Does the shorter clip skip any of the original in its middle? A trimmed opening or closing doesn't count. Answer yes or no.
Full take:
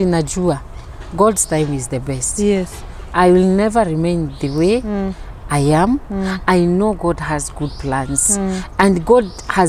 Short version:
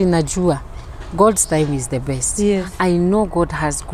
yes